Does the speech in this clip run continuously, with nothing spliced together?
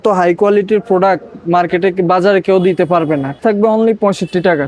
no; 1 cut; at 3.4 s

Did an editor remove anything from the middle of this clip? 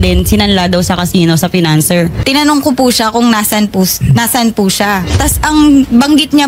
yes; 1 cut; at 2.2 s

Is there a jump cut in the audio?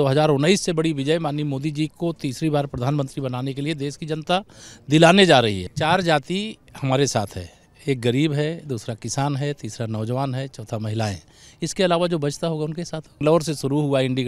yes; 2 cuts; at 5.7 s, 13.2 s

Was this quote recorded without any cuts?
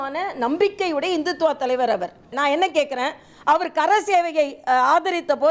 no; 1 cut; at 2.4 s

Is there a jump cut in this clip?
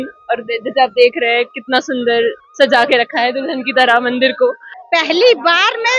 yes; 1 cut; at 4.7 s

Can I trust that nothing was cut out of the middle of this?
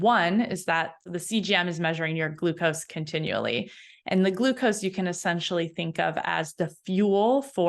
no; 1 cut; at 1.0 s

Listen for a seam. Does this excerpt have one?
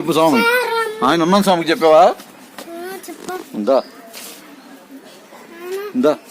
yes; 1 cut; at 5.3 s

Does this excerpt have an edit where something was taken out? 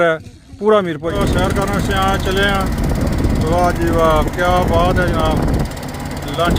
yes; 1 cut; at 1.1 s

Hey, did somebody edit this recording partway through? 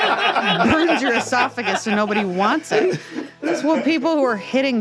no; 0 cuts

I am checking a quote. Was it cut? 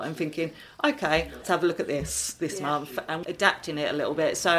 yes; 2 cuts; at 1.4 s, 3.2 s

